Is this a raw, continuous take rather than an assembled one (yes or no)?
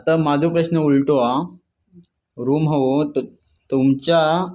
yes